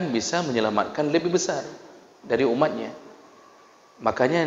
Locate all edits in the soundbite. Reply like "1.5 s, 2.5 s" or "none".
none